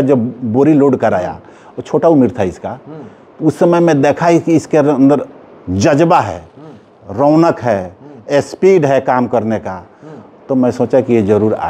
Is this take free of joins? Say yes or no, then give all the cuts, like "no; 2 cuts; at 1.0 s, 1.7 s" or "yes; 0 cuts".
yes; 0 cuts